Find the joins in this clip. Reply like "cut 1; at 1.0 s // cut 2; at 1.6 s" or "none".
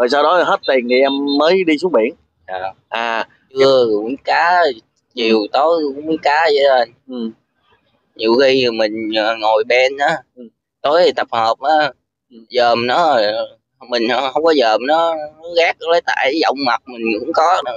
cut 1; at 3.6 s